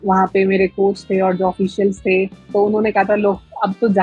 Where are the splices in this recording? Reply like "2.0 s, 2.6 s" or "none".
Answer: 2.4 s